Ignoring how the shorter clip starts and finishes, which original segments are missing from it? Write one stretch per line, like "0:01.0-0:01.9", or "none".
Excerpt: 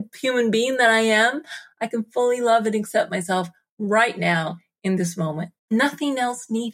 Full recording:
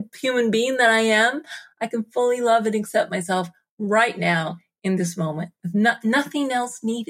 0:05.6-0:06.0